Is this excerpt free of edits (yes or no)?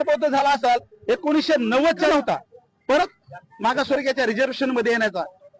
no